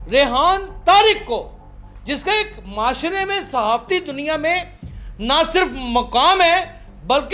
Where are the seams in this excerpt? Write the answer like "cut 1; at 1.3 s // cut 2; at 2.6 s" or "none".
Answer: none